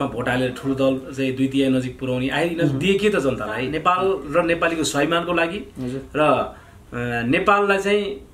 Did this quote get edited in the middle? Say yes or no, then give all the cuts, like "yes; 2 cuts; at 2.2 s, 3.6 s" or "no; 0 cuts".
yes; 1 cut; at 3.7 s